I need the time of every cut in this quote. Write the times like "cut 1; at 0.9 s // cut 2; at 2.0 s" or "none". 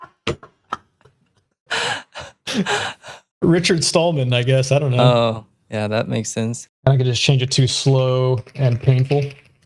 cut 1; at 6.7 s